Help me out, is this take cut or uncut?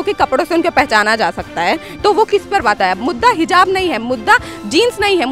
cut